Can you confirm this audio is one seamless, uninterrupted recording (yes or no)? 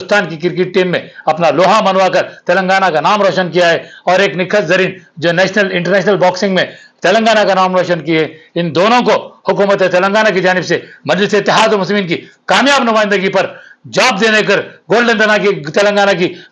yes